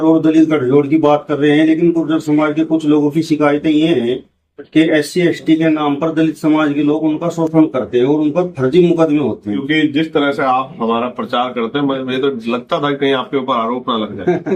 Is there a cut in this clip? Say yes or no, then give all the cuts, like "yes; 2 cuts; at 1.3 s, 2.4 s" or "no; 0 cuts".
yes; 1 cut; at 9.6 s